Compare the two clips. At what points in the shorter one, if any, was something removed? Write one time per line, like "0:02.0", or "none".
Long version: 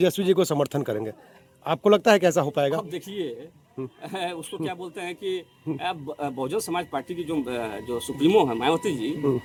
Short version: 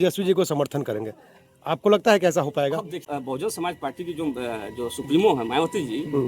0:03.0